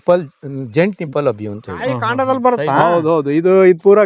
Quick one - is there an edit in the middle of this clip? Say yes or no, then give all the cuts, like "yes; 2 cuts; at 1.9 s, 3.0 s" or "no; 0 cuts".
yes; 1 cut; at 2.0 s